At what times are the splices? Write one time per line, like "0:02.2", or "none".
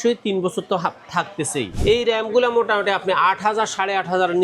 0:01.7